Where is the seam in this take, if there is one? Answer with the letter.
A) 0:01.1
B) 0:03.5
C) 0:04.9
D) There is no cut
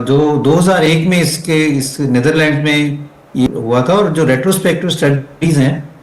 B